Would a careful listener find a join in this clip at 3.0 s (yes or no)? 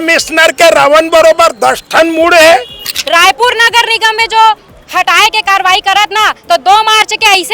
yes